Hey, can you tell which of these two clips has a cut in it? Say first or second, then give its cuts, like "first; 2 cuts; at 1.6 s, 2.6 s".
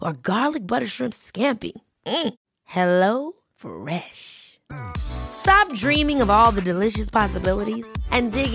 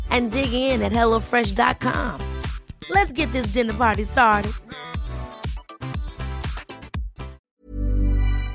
second; 1 cut; at 7.4 s